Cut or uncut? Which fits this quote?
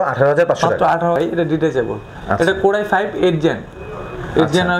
cut